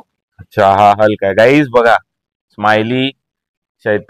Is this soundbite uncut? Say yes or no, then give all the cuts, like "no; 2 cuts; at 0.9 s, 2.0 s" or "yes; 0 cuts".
yes; 0 cuts